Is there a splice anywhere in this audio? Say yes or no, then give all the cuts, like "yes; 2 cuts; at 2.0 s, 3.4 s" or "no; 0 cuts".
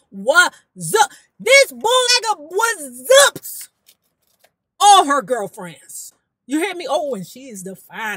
yes; 1 cut; at 2.2 s